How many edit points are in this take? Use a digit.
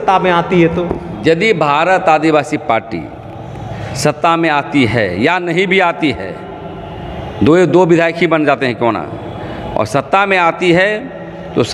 0